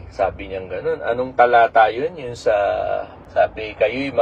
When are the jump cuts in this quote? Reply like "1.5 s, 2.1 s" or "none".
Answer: 3.2 s